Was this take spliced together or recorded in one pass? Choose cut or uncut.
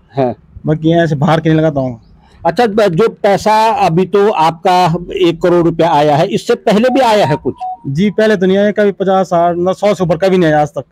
uncut